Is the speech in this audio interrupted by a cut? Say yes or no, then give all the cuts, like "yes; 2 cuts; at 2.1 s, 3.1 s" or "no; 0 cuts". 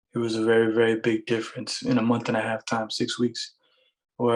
no; 0 cuts